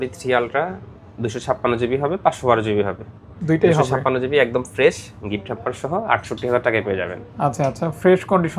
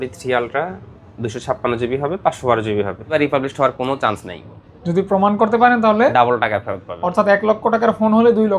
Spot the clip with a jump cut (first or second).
second